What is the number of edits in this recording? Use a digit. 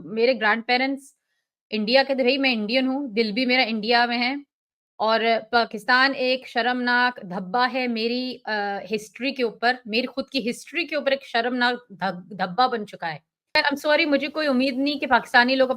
1